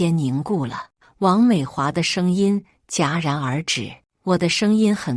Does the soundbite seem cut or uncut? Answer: cut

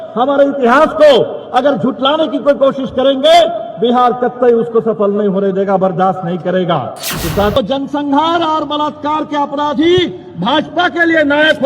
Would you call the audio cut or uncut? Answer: cut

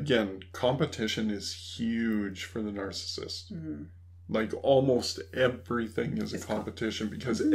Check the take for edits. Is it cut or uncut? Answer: uncut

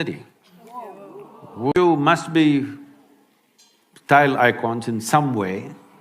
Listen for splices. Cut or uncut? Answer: cut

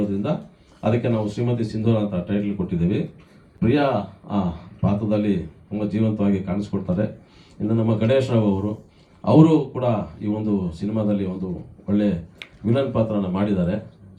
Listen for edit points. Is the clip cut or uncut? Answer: uncut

